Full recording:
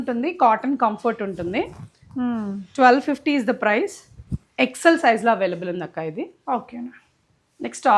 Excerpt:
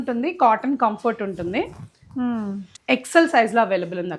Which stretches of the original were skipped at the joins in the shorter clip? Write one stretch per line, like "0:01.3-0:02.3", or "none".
0:02.6-0:04.3